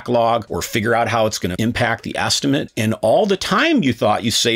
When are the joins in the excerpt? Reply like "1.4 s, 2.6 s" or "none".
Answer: 1.5 s, 2.7 s